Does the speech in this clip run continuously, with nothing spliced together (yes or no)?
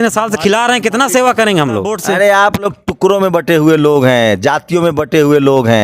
no